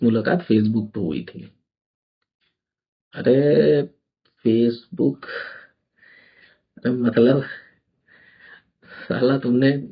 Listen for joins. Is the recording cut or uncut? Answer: uncut